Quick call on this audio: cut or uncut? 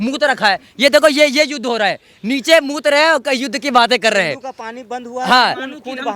uncut